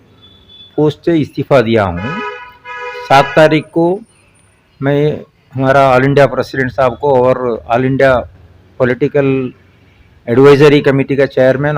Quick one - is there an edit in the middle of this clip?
no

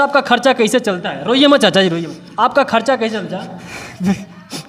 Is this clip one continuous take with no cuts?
yes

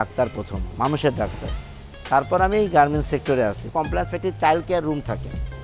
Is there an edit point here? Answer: yes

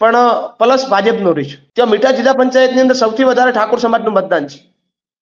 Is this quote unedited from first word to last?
no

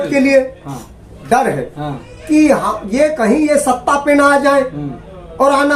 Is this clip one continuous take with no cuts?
yes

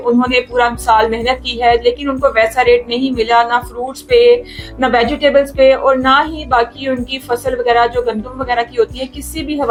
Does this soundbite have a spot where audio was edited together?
no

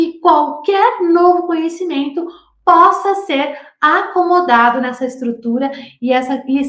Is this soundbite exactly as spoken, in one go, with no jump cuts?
yes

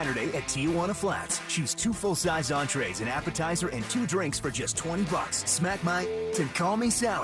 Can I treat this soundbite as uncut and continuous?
yes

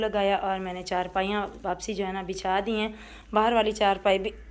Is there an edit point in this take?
no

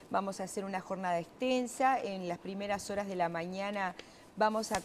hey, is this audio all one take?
no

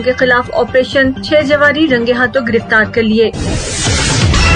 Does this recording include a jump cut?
yes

